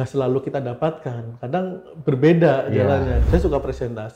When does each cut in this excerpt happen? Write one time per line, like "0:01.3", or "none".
0:03.2